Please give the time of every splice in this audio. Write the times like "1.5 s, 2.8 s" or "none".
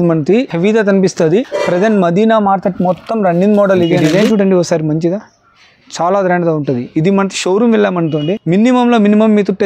4.0 s